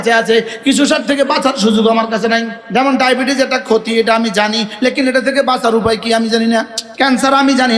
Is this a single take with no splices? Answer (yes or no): no